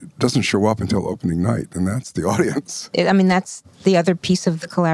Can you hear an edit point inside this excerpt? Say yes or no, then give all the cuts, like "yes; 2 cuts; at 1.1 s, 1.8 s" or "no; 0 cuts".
yes; 1 cut; at 2.6 s